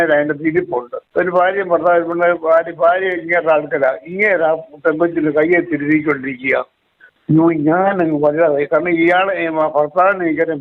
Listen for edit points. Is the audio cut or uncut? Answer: cut